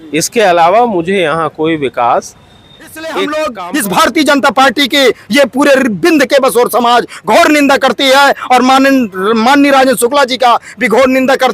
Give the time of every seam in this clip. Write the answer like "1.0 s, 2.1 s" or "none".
3.3 s